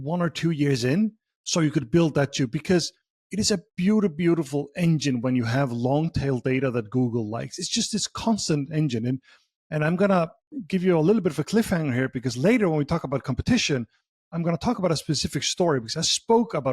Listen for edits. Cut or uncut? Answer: uncut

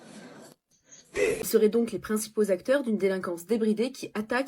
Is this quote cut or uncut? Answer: cut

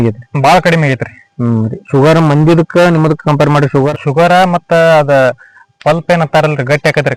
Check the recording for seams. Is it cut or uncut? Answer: uncut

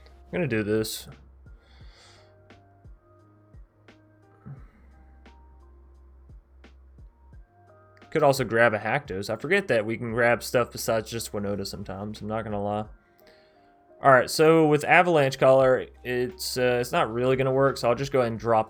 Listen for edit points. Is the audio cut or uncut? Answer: uncut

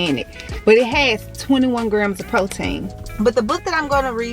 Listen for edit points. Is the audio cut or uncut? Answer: cut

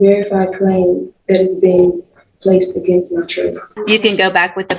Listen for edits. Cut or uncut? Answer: cut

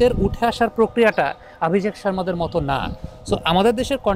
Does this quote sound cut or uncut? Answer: uncut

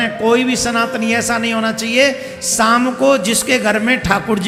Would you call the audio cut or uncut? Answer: uncut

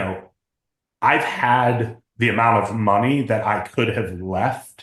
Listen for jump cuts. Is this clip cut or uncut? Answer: uncut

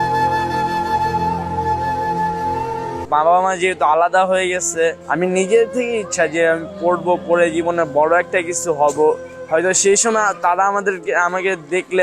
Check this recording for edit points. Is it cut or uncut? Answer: cut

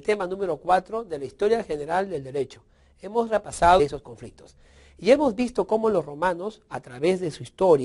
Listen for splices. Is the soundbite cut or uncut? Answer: uncut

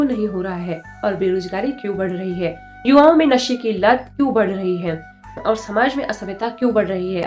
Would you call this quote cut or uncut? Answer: uncut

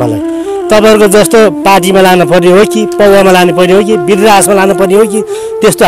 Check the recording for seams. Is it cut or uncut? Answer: uncut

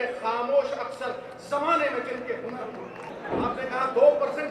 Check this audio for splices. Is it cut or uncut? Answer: cut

